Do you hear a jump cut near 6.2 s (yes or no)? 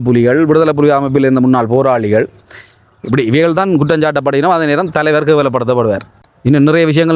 yes